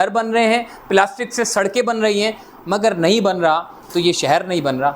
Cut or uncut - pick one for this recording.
uncut